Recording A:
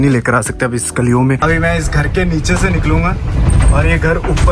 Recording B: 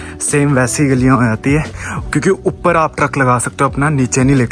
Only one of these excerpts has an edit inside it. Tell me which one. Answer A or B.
A